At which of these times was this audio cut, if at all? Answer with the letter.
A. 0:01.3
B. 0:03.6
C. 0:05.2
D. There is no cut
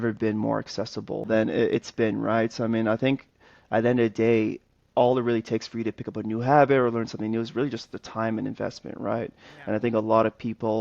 A